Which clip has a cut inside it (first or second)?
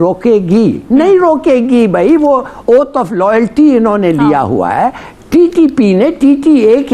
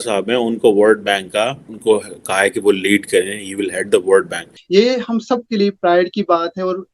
second